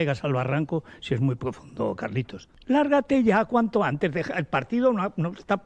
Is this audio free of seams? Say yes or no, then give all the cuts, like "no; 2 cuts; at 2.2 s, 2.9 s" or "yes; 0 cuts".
yes; 0 cuts